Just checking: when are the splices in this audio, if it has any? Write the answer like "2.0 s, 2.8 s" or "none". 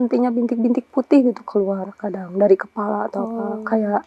none